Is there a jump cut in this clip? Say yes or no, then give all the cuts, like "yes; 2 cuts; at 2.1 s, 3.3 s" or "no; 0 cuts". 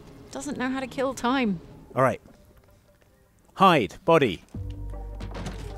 yes; 2 cuts; at 1.8 s, 4.4 s